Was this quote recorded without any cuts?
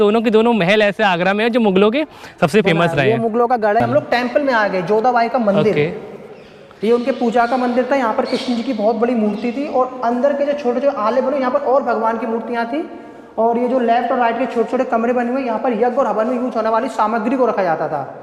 yes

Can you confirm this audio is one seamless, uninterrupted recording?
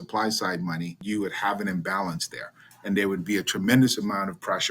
no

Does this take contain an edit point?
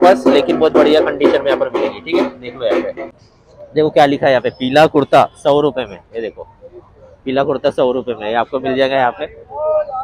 yes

